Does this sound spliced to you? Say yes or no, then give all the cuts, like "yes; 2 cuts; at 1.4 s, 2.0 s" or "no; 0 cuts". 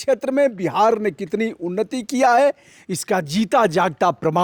no; 0 cuts